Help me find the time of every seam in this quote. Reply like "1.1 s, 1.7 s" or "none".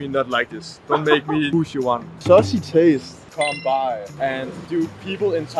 2.1 s, 3.2 s